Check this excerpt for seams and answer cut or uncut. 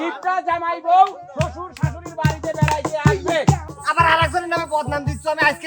cut